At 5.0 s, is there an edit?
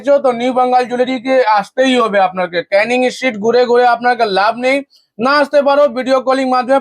no; 0 cuts

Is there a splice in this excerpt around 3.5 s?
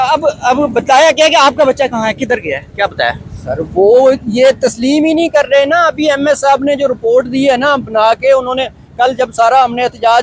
no; 0 cuts

